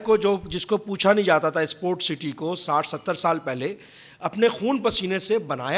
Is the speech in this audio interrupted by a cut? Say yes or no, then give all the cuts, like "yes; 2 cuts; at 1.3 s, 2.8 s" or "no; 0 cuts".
no; 0 cuts